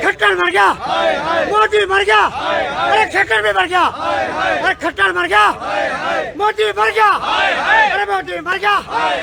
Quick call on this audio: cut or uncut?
uncut